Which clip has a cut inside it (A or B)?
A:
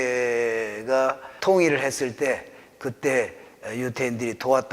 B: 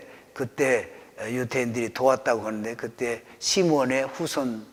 A